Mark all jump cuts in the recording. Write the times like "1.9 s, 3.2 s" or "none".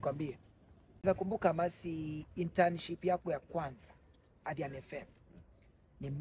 1.0 s